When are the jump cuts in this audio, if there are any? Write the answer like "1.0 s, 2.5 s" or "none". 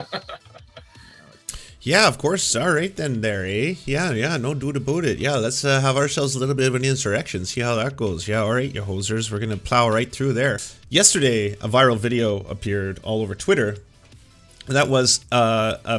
10.6 s